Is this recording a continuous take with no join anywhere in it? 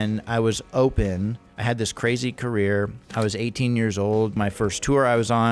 no; 3 cuts; at 1.5 s, 3.1 s, 4.4 s

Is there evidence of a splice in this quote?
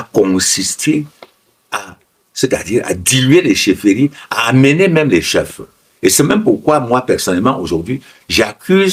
no; 0 cuts

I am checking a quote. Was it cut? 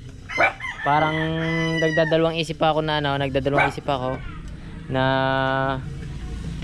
no; 0 cuts

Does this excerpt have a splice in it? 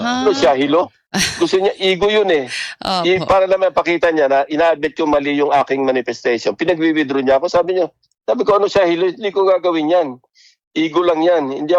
no; 0 cuts

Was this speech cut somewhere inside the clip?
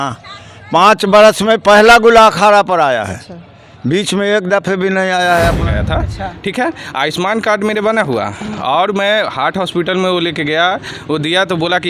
yes; 1 cut; at 5.6 s

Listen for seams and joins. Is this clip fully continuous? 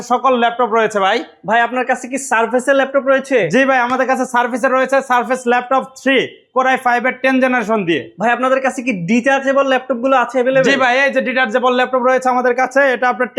yes; 0 cuts

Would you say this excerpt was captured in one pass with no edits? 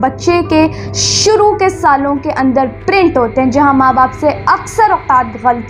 yes; 0 cuts

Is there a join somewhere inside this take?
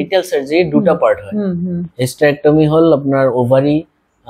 yes; 1 cut; at 1.8 s

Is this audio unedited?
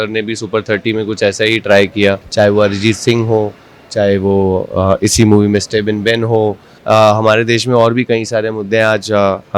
no; 2 cuts; at 2.2 s, 6.7 s

